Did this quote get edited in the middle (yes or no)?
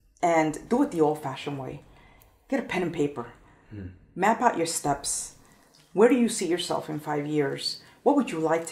no